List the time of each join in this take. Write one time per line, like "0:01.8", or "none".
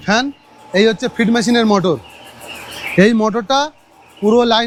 none